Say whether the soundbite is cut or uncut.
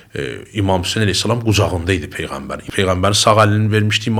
uncut